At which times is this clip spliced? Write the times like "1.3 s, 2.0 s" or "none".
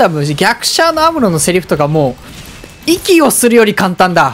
none